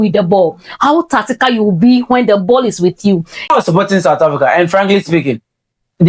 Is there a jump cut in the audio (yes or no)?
yes